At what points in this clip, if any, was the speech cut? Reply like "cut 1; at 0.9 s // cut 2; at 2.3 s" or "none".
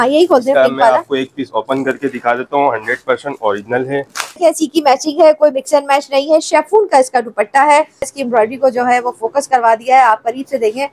cut 1; at 4.4 s // cut 2; at 8.1 s